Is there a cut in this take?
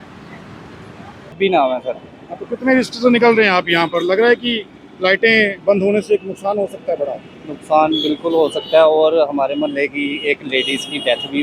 yes; 1 cut; at 1.4 s

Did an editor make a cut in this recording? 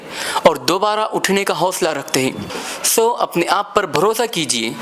yes; 1 cut; at 2.7 s

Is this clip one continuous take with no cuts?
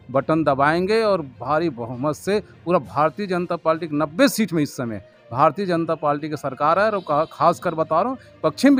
yes; 0 cuts

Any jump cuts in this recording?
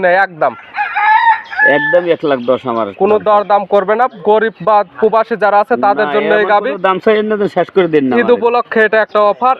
no; 0 cuts

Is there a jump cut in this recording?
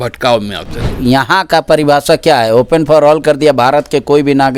yes; 1 cut; at 0.9 s

